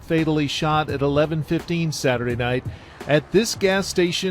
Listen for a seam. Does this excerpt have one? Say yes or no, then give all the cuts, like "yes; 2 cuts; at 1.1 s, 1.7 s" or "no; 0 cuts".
no; 0 cuts